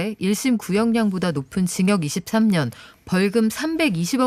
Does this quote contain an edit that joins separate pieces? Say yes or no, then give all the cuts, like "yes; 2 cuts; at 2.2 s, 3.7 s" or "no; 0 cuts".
no; 0 cuts